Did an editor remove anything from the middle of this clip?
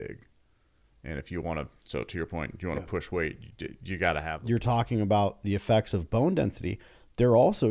yes; 1 cut; at 4.3 s

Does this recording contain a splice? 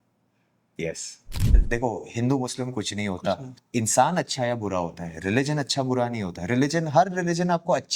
yes; 2 cuts; at 1.6 s, 3.5 s

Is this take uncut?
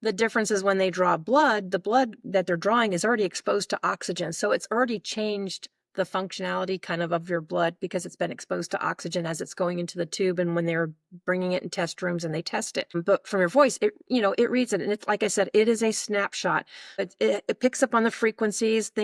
no; 2 cuts; at 12.9 s, 17.0 s

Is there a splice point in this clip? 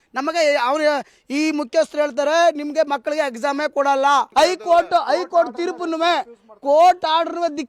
no; 0 cuts

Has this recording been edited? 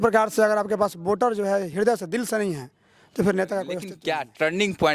yes; 1 cut; at 3.9 s

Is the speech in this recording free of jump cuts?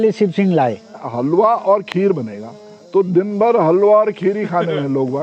no; 1 cut; at 1.1 s

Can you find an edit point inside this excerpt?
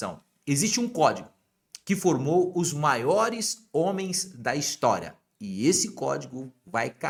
no; 0 cuts

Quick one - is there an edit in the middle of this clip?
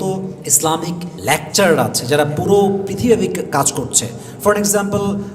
yes; 1 cut; at 1.1 s

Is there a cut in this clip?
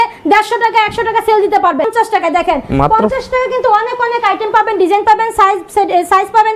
yes; 1 cut; at 1.9 s

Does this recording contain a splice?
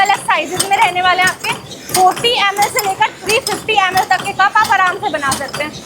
no; 0 cuts

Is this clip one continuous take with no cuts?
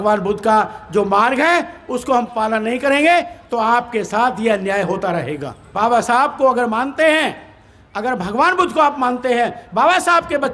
no; 1 cut; at 5.7 s

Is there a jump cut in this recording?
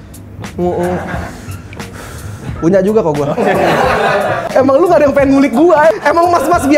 yes; 2 cuts; at 4.4 s, 5.9 s

